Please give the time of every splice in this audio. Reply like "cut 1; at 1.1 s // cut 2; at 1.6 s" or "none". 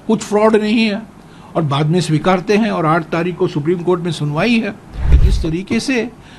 cut 1; at 5.2 s